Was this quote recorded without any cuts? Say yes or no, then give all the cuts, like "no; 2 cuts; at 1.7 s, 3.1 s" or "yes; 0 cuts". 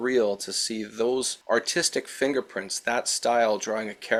yes; 0 cuts